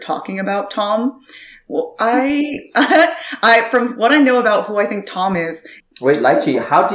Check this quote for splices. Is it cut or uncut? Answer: cut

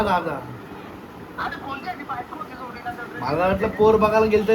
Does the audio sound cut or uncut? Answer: uncut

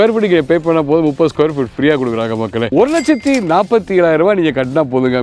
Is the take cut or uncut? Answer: cut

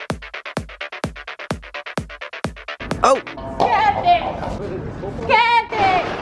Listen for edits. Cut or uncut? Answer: uncut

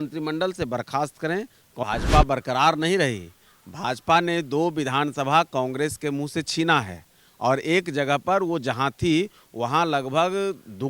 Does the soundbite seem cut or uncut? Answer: cut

